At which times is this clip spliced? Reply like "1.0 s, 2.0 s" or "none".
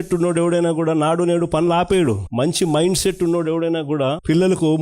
none